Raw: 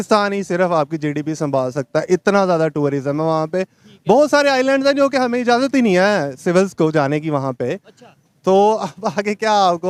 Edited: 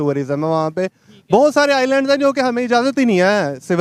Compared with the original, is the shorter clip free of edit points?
yes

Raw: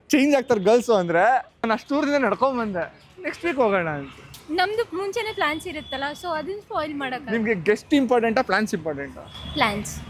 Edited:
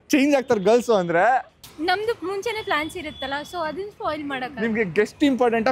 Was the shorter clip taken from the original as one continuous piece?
no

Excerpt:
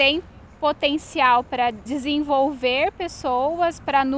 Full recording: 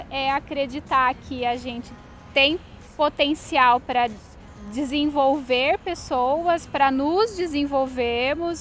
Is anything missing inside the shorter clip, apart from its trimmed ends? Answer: yes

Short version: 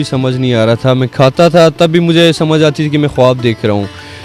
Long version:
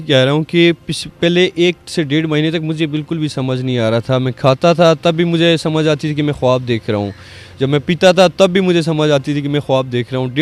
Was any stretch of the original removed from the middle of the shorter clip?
no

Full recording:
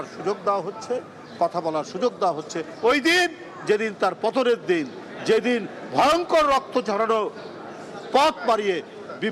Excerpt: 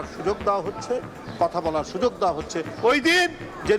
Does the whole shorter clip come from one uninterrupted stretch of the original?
yes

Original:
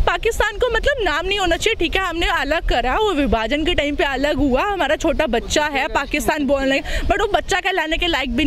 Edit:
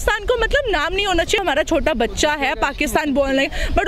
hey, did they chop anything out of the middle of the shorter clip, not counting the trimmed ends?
yes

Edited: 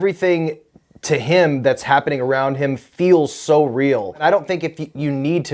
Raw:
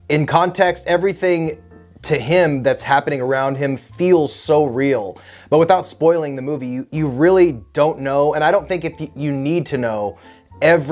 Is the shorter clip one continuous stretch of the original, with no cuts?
no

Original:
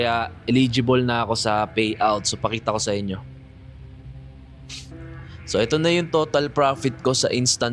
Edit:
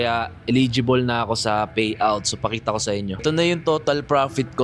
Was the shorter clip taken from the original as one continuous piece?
no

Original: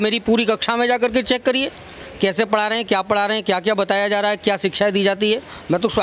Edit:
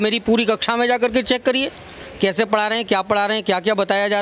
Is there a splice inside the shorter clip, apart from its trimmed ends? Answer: no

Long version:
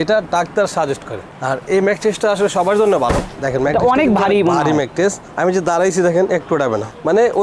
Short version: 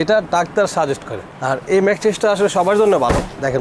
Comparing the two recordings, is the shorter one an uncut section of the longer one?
yes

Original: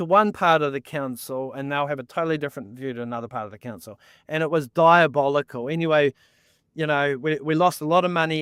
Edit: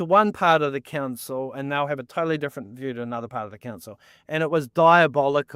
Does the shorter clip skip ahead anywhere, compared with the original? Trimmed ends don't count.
no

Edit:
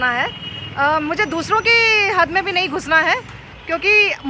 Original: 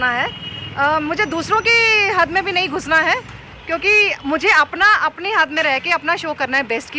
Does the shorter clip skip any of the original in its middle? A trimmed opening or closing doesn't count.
no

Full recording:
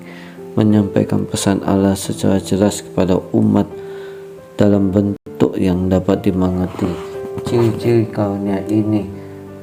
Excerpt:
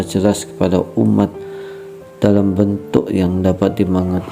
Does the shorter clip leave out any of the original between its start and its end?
yes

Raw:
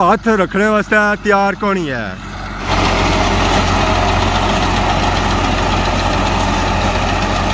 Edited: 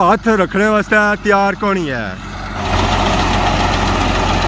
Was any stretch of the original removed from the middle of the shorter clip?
yes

